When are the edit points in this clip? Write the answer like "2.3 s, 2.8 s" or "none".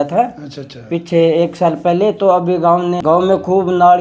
3.0 s